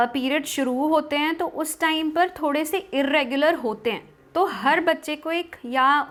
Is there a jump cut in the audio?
no; 0 cuts

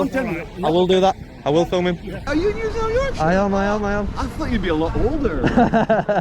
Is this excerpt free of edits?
no; 1 cut; at 2.2 s

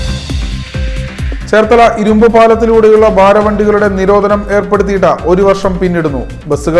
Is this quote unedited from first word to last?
yes; 0 cuts

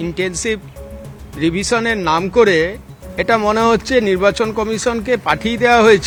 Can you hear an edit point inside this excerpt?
no; 0 cuts

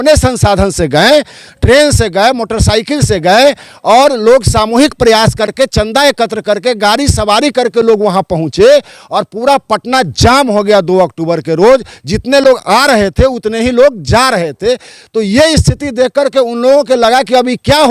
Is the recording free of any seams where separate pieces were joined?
yes; 0 cuts

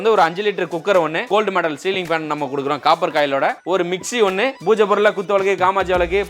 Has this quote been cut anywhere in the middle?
yes; 3 cuts; at 1.3 s, 3.6 s, 4.6 s

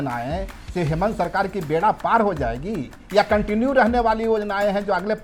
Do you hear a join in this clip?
no; 0 cuts

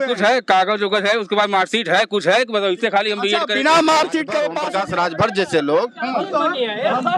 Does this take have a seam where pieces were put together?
yes; 1 cut; at 4.6 s

